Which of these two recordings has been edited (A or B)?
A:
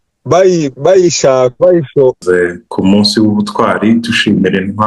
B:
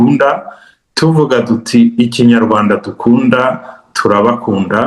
A